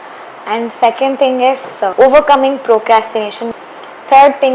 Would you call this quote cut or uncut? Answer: cut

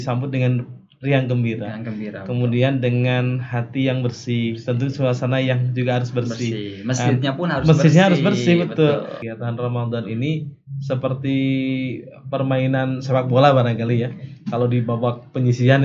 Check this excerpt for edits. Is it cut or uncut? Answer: cut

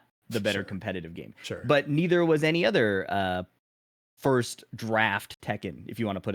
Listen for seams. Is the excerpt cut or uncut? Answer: uncut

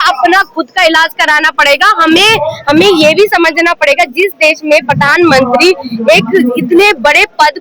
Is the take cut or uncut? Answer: uncut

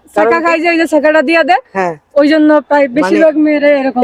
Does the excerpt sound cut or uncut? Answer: uncut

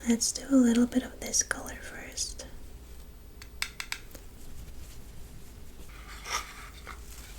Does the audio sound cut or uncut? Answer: cut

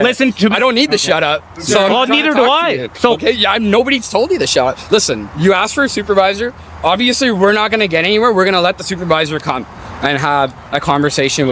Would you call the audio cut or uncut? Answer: uncut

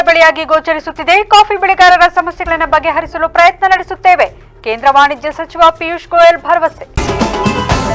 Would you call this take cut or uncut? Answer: cut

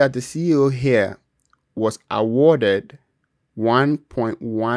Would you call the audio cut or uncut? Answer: uncut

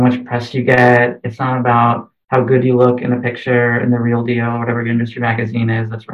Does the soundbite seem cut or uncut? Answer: uncut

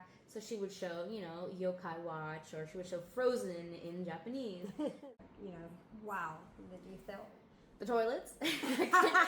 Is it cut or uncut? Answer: cut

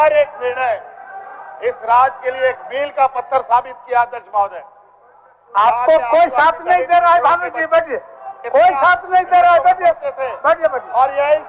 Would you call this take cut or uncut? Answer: uncut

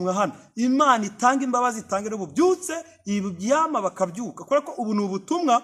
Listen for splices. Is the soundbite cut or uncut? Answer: uncut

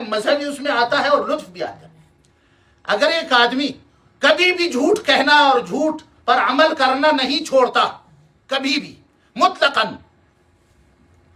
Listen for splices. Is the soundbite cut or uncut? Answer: uncut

